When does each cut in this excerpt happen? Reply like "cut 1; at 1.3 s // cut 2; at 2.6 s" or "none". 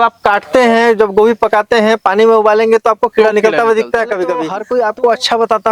cut 1; at 4.5 s